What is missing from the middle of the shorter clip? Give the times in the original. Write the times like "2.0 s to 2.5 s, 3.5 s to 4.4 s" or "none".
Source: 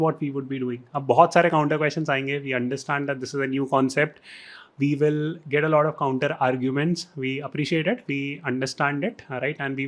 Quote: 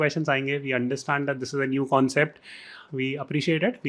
4.6 s to 7.1 s